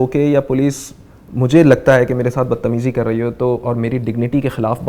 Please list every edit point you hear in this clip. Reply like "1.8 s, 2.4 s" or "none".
none